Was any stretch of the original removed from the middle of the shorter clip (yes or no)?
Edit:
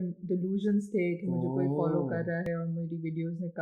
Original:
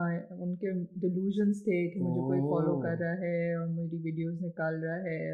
yes